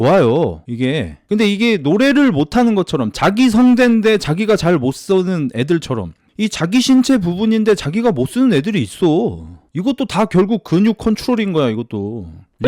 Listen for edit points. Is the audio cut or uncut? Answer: cut